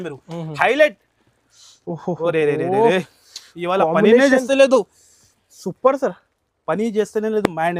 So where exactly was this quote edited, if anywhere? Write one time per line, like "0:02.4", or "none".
none